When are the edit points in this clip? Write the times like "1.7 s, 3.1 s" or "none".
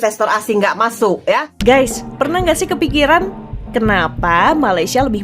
1.5 s